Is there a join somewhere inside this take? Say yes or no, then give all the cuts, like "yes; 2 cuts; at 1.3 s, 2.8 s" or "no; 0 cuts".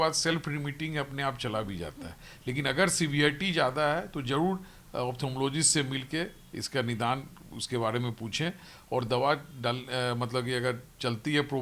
no; 0 cuts